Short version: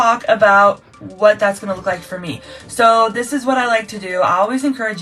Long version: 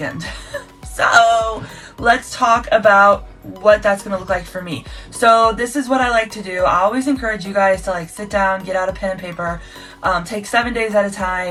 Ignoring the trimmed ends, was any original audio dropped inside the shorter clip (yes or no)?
no